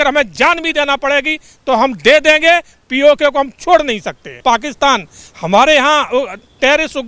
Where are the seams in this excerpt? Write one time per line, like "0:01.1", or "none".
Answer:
0:04.4

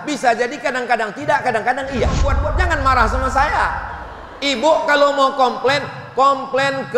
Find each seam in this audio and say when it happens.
0:02.4

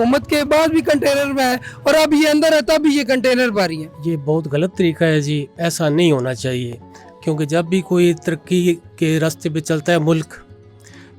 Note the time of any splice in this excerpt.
0:03.9

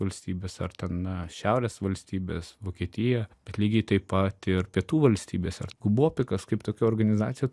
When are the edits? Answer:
0:03.4
0:05.7

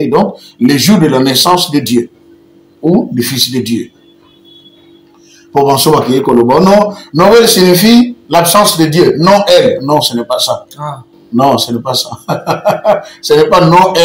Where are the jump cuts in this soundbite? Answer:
none

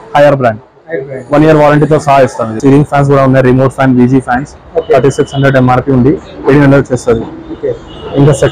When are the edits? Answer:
0:02.6

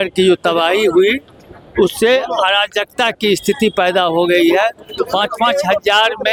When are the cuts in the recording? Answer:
none

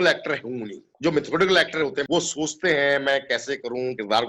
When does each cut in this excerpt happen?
none

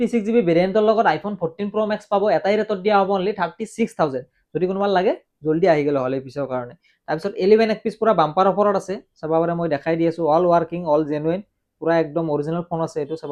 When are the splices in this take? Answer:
none

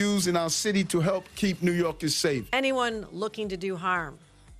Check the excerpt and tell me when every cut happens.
0:02.5

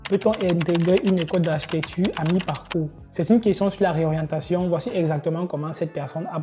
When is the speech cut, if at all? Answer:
0:03.0

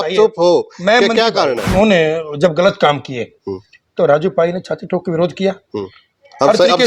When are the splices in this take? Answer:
0:01.6

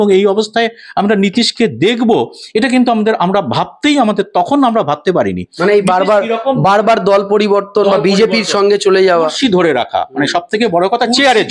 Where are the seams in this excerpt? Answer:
none

